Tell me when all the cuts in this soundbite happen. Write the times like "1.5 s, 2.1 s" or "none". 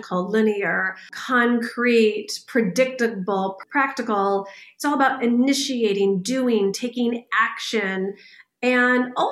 1.2 s, 3.6 s